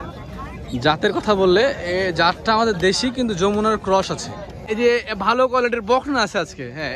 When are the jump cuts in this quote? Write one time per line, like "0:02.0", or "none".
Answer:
0:04.6